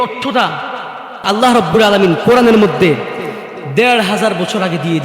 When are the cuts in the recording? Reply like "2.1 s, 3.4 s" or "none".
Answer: 1.2 s

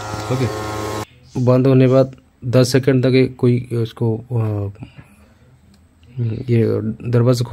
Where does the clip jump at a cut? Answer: 1.0 s

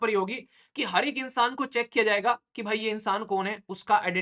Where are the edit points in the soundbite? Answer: none

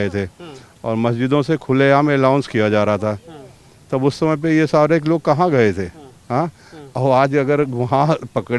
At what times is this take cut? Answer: none

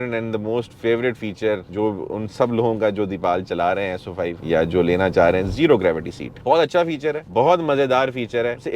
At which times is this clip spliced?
none

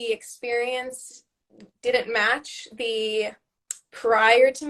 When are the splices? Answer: none

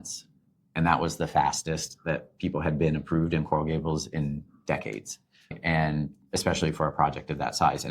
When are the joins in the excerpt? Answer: 5.6 s

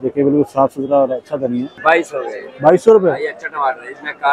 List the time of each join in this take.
1.8 s

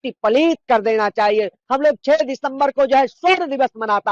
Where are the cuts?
1.6 s

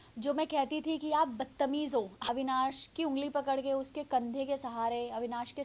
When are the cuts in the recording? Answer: 2.2 s

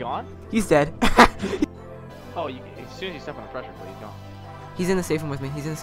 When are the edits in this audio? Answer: 1.6 s

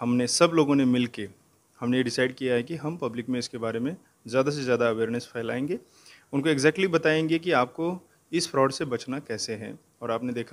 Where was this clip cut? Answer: none

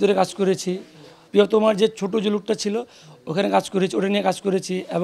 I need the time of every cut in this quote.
1.2 s

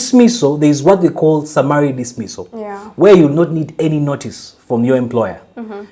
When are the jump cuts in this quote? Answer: none

